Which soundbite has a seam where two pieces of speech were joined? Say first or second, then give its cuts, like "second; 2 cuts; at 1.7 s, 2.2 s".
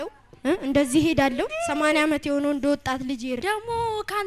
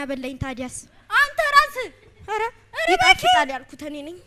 first; 2 cuts; at 1.5 s, 3.4 s